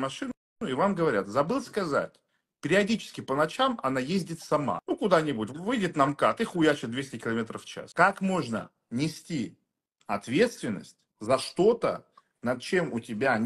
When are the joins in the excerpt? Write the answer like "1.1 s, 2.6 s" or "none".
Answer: 4.8 s, 7.8 s